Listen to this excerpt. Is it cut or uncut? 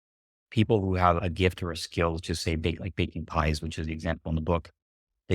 cut